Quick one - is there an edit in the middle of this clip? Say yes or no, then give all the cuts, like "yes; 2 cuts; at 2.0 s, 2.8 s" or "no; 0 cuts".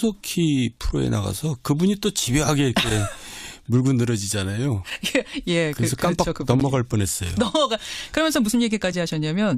yes; 1 cut; at 3.6 s